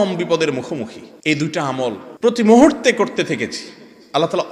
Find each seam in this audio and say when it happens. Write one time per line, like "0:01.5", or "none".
0:01.1
0:02.1

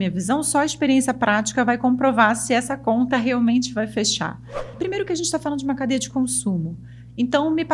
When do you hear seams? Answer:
0:04.7

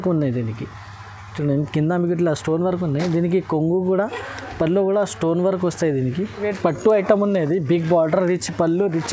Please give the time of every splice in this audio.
0:06.4

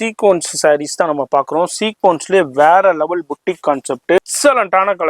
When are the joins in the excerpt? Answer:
0:04.2

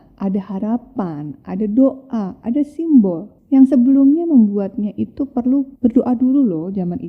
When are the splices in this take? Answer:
0:03.3
0:05.7

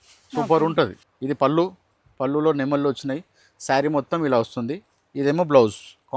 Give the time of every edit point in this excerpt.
0:01.1

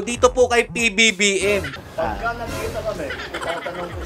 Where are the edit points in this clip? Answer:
0:01.8

